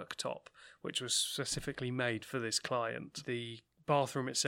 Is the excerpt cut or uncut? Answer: cut